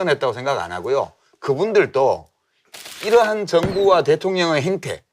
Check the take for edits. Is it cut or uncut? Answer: cut